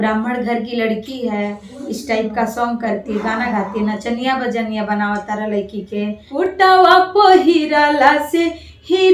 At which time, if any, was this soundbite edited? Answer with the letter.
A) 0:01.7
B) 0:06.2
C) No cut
B